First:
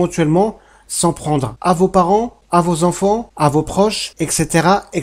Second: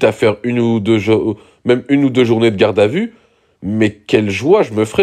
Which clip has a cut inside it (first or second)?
first